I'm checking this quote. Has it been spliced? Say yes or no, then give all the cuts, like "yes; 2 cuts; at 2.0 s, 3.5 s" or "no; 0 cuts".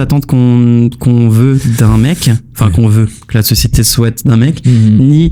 no; 0 cuts